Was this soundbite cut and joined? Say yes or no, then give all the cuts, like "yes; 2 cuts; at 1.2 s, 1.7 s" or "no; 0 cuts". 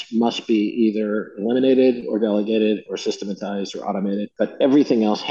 yes; 1 cut; at 4.3 s